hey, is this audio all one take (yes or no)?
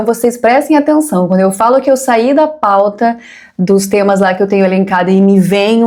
yes